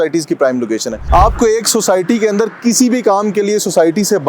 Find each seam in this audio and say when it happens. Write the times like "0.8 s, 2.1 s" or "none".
1.0 s